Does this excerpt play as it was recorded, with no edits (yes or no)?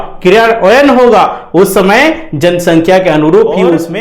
yes